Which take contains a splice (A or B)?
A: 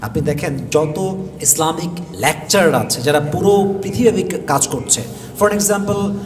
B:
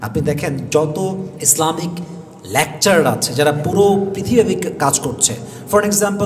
A